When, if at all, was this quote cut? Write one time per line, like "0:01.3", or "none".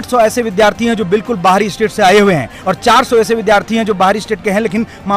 none